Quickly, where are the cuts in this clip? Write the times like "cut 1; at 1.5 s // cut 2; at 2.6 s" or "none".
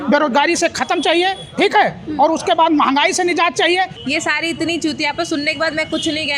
cut 1; at 4.0 s